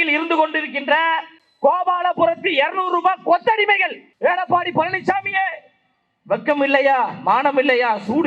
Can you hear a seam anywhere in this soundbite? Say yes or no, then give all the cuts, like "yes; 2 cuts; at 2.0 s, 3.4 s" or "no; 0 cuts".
yes; 1 cut; at 4.0 s